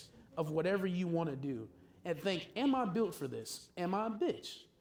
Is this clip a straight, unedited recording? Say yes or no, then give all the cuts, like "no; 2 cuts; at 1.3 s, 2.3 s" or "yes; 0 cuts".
yes; 0 cuts